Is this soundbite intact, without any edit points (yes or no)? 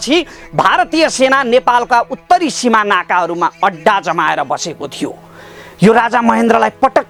yes